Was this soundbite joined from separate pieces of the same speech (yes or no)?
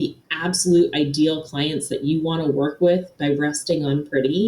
yes